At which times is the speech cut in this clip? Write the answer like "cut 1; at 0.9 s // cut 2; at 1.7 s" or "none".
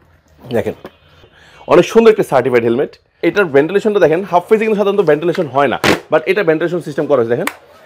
cut 1; at 3.2 s